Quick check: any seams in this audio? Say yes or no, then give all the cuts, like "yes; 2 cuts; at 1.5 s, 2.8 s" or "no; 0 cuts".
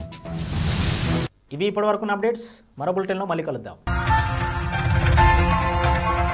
no; 0 cuts